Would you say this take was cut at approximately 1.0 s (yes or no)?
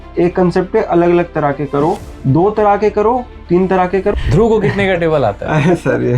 no